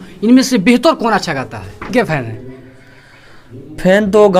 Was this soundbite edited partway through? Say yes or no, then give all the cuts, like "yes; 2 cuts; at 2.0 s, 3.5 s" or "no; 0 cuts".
yes; 1 cut; at 1.9 s